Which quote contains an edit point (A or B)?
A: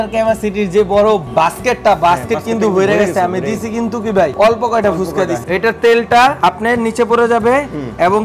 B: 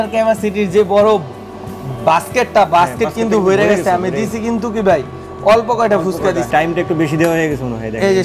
A